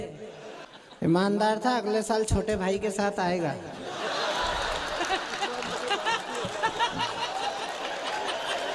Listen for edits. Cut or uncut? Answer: cut